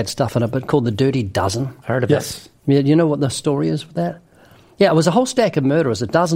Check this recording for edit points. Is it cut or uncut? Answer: cut